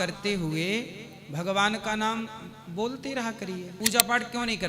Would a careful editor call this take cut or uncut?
cut